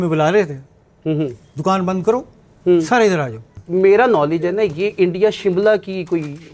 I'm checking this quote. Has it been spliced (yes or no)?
yes